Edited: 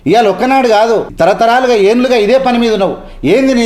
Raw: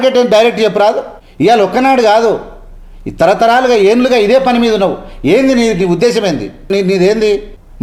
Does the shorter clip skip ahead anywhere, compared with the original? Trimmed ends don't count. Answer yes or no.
yes